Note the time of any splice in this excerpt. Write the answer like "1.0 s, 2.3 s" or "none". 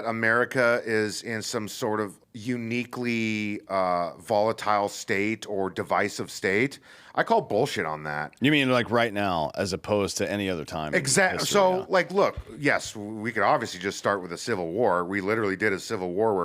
2.3 s